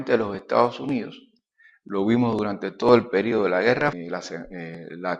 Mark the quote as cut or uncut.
uncut